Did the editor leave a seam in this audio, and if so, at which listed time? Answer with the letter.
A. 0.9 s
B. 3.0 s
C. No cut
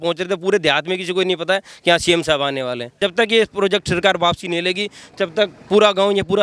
B